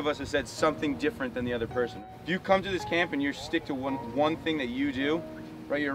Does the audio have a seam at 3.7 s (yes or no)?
no